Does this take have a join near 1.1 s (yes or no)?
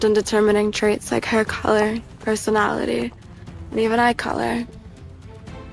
no